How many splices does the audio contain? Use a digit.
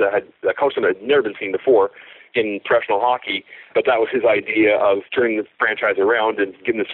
2